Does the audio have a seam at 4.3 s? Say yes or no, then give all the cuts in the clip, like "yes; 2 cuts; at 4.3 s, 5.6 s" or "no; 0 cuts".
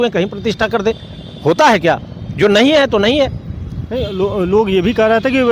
no; 0 cuts